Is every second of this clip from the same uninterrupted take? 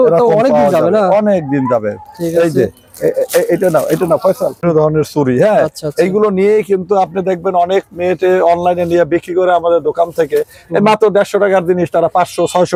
yes; 0 cuts

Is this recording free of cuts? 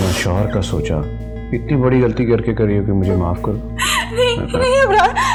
yes; 0 cuts

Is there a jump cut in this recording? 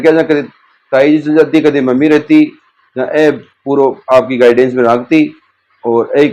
no; 0 cuts

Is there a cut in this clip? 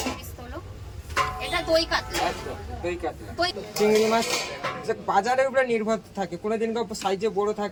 no; 0 cuts

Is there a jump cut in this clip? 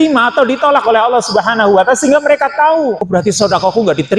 yes; 1 cut; at 3.0 s

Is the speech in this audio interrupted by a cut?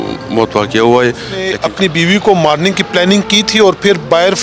yes; 1 cut; at 1.5 s

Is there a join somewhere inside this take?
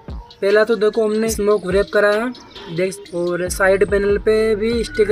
yes; 2 cuts; at 1.3 s, 3.0 s

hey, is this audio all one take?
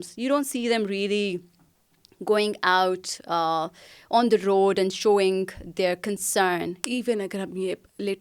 no; 1 cut; at 6.8 s

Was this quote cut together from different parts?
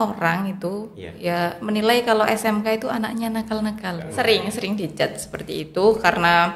yes; 1 cut; at 4.1 s

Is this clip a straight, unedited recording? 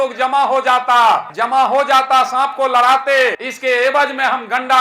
no; 2 cuts; at 1.3 s, 3.5 s

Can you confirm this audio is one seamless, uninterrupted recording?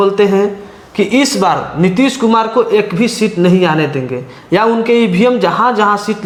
yes; 0 cuts

